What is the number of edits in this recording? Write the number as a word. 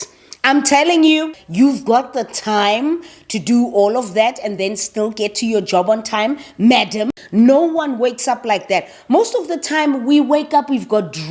two